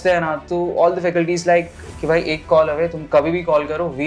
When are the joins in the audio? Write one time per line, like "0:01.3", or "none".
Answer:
none